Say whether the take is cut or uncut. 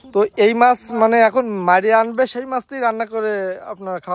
uncut